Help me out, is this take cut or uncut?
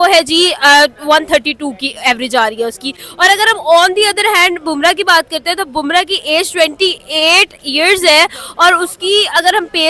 uncut